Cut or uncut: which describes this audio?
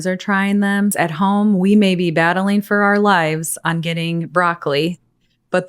cut